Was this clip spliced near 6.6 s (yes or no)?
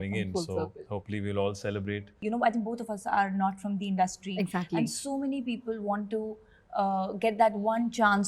no